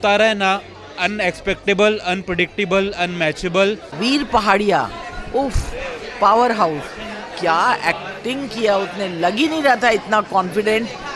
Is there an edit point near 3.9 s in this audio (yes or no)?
yes